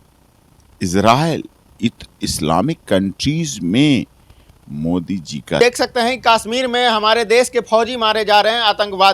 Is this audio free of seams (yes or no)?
no